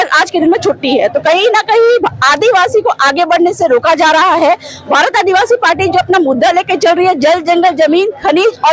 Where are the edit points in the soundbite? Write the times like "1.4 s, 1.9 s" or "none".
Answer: none